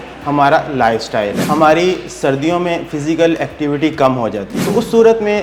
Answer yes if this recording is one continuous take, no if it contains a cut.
no